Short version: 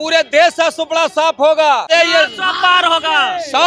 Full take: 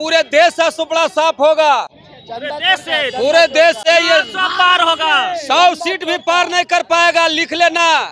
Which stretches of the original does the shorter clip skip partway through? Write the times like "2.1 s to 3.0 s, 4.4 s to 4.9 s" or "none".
1.8 s to 3.8 s